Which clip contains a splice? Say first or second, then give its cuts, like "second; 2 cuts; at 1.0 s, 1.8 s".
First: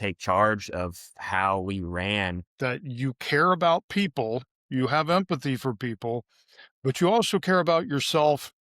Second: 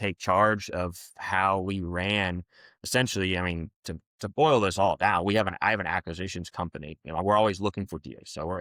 first; 1 cut; at 2.4 s